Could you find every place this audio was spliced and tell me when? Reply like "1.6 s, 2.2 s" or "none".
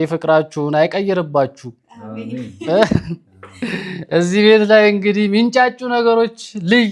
none